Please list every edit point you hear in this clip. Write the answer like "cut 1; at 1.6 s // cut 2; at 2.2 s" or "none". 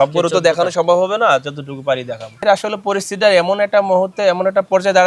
cut 1; at 2.4 s